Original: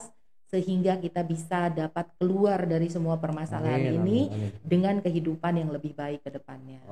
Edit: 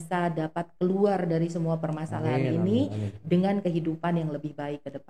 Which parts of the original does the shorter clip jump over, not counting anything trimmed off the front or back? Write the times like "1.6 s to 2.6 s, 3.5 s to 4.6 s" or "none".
none